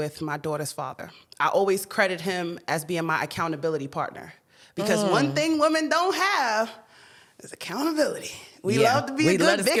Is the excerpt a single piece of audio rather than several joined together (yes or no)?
yes